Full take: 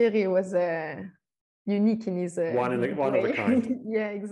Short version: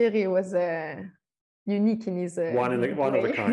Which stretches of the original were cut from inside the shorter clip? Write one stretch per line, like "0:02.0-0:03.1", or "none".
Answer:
none